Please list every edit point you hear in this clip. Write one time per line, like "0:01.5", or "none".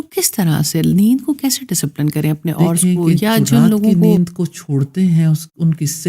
0:04.0